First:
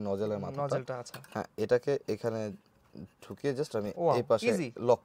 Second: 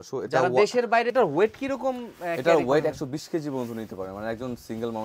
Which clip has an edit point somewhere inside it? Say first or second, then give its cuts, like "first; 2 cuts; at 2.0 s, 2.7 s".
second; 1 cut; at 1.1 s